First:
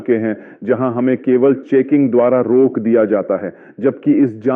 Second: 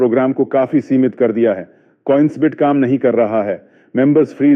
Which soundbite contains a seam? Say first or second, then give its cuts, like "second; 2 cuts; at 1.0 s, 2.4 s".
first; 1 cut; at 3.2 s